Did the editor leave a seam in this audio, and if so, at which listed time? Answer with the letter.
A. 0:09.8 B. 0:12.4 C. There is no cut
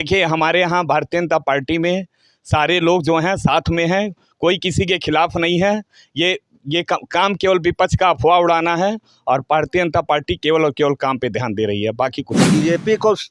B